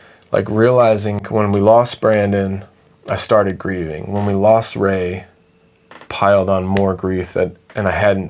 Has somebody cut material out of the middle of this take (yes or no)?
yes